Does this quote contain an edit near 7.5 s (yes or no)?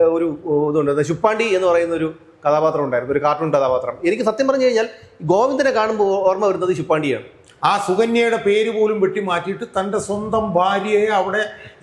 yes